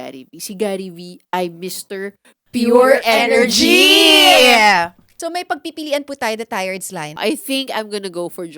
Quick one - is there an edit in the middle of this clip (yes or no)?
yes